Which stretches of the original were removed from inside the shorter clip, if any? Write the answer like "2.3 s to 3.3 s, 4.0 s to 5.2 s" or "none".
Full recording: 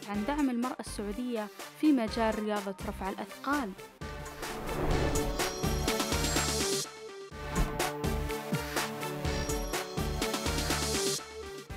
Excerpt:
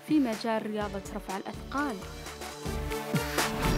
4.3 s to 8.0 s